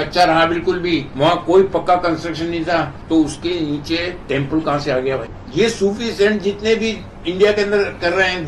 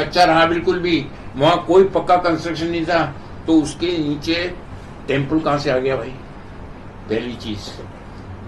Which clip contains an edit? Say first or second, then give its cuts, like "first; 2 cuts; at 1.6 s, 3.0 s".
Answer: first; 4 cuts; at 1.1 s, 3.0 s, 4.2 s, 5.4 s